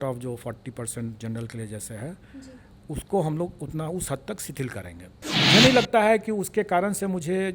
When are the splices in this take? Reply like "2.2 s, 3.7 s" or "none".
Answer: 5.3 s